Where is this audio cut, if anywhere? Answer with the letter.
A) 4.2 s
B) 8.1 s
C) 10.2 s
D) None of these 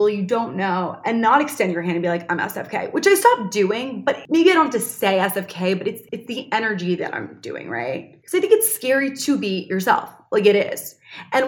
B